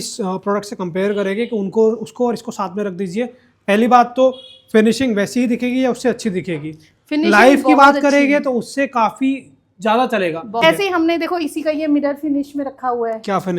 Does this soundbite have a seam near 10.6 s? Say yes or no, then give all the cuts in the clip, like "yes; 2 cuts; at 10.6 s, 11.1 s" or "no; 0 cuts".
yes; 1 cut; at 10.6 s